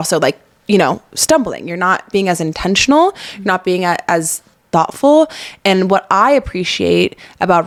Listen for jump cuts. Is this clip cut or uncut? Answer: uncut